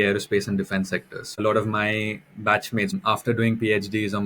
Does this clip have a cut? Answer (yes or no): yes